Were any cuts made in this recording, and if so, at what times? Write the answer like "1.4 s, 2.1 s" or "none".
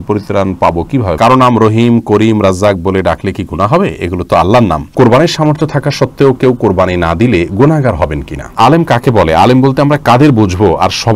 1.1 s, 4.9 s, 8.5 s